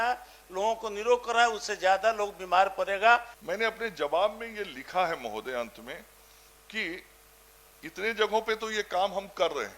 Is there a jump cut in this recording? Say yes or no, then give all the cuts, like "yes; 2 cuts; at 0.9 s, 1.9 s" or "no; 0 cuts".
yes; 1 cut; at 3.4 s